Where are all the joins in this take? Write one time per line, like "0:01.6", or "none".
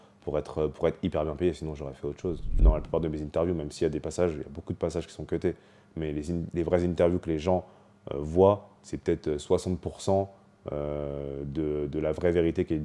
0:02.5